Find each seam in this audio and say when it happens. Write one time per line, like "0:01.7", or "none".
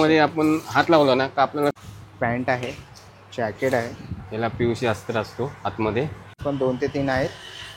0:01.8
0:06.4